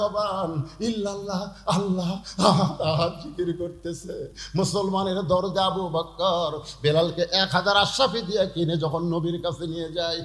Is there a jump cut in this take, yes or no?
no